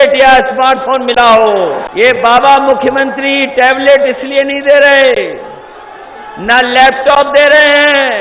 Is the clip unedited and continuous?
no; 1 cut; at 1.8 s

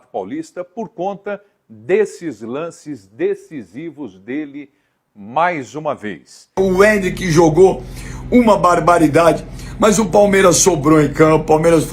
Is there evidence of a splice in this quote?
yes; 1 cut; at 6.6 s

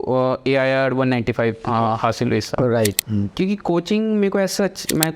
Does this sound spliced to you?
yes; 1 cut; at 3.0 s

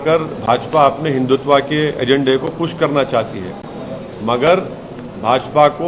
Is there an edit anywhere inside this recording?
no; 0 cuts

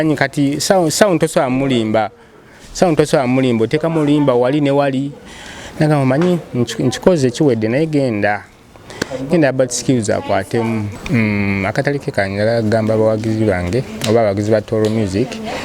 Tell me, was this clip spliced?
yes; 1 cut; at 10.9 s

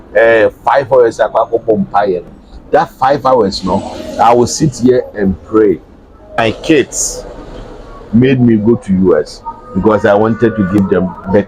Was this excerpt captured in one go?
no; 1 cut; at 6.4 s

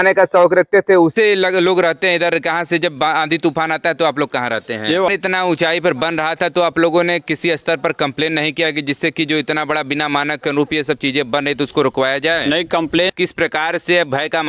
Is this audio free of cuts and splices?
no; 3 cuts; at 1.1 s, 5.0 s, 13.1 s

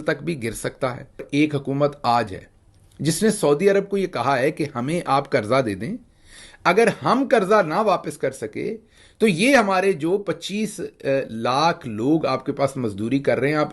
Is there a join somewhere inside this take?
yes; 1 cut; at 1.6 s

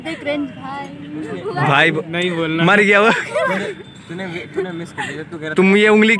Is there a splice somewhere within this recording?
no; 0 cuts

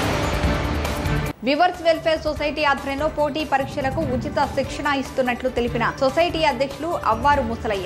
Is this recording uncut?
no; 1 cut; at 0.9 s

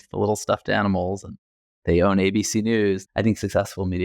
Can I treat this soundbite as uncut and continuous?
no; 1 cut; at 3.1 s

